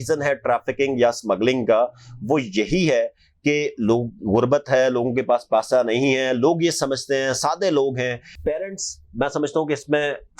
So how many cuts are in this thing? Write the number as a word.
one